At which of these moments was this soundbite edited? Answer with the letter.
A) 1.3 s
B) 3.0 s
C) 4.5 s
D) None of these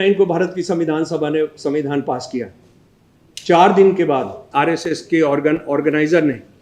C